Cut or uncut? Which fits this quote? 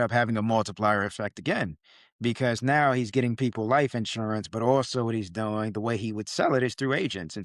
uncut